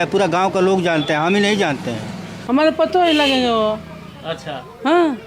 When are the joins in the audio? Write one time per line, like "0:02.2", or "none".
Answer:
0:02.3